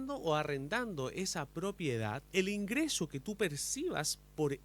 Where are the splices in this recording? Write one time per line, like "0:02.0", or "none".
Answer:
0:02.2